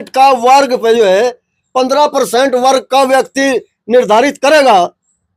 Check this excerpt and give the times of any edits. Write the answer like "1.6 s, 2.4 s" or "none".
none